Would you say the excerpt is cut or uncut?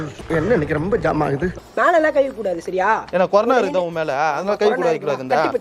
cut